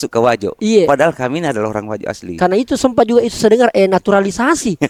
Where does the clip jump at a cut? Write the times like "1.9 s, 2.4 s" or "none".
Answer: none